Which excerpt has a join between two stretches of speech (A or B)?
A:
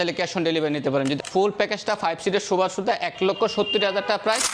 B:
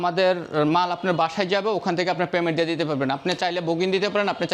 A